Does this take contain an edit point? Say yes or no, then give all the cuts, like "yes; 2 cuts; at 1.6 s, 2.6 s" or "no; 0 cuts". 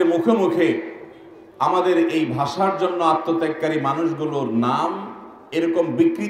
no; 0 cuts